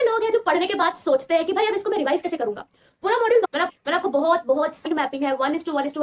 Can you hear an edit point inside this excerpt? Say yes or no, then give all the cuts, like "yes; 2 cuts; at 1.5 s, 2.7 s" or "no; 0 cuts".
yes; 2 cuts; at 3.5 s, 4.9 s